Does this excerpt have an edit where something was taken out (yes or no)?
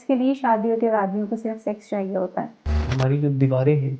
yes